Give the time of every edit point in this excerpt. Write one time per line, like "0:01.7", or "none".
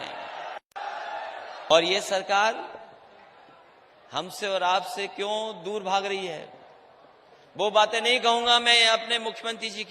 0:01.7